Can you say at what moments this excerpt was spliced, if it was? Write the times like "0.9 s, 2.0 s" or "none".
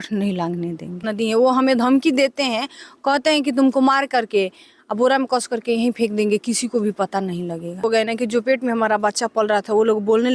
1.0 s, 7.8 s